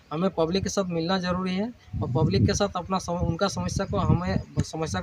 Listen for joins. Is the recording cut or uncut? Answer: uncut